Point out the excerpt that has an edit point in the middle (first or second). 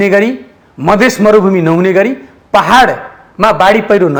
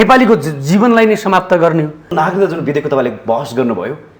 second